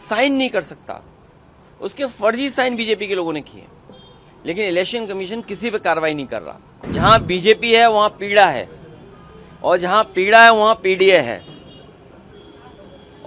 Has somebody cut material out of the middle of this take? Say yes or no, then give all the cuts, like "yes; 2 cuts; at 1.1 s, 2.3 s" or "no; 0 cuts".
yes; 1 cut; at 6.9 s